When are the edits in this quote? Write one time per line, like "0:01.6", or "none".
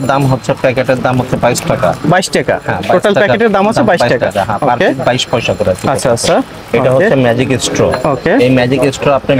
none